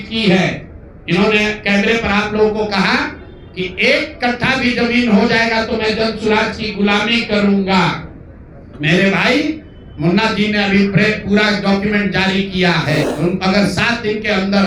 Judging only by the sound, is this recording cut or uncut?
cut